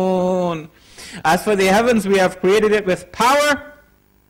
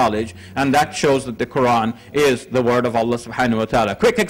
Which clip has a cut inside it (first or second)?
first